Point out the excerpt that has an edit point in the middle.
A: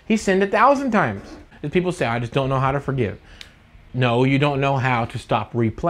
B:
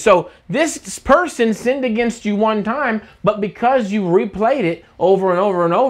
A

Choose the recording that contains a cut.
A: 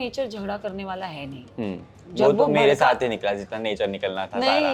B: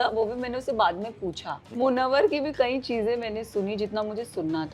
B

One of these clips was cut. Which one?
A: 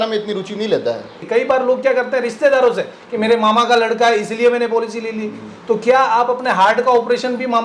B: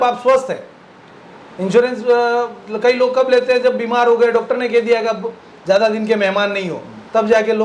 A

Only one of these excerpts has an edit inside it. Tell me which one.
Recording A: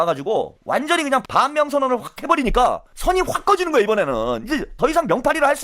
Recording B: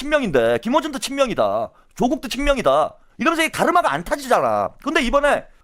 A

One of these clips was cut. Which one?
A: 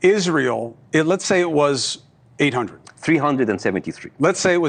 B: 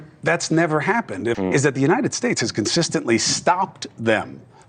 B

